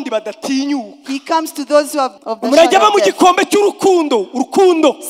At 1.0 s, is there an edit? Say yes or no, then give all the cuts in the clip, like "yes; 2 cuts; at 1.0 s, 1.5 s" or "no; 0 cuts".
no; 1 cut; at 2.2 s